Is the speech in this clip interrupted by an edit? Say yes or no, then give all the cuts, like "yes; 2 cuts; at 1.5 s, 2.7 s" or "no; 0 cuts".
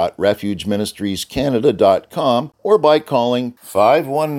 yes; 1 cut; at 2.5 s